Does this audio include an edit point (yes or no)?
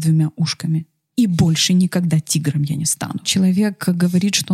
yes